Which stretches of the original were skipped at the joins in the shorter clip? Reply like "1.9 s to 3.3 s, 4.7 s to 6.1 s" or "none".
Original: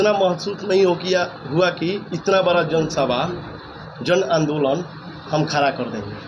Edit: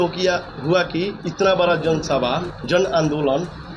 3.4 s to 3.9 s